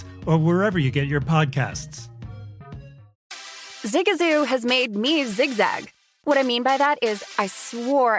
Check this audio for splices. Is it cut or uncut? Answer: cut